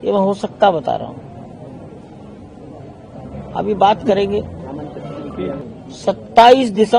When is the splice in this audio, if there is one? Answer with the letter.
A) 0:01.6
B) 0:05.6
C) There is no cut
B